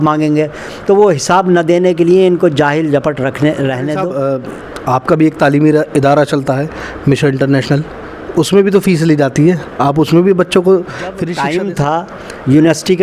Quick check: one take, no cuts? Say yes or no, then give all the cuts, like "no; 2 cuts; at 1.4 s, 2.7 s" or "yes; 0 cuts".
no; 2 cuts; at 4.0 s, 11.2 s